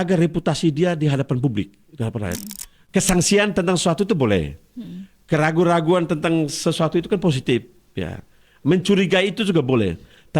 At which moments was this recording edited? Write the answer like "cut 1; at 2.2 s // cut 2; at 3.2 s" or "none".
cut 1; at 2.8 s